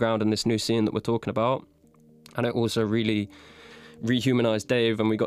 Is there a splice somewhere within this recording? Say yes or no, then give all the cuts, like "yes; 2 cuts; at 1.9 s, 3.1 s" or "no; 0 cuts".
no; 0 cuts